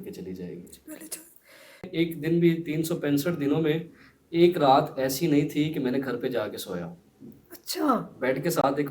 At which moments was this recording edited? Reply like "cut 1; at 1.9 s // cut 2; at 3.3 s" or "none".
cut 1; at 1.9 s